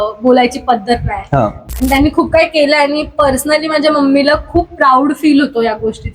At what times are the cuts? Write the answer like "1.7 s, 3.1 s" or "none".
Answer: 1.6 s